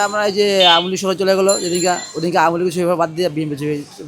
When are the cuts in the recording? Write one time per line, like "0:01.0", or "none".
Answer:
none